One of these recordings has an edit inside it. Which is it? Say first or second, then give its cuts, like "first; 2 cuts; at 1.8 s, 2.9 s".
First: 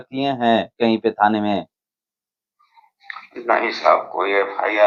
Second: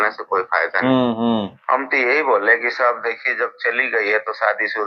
second; 1 cut; at 1.6 s